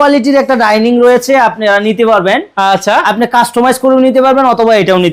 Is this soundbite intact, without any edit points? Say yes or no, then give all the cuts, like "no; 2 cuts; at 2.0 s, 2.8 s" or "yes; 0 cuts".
yes; 0 cuts